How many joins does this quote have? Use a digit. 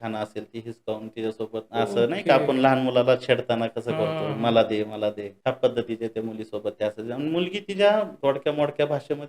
3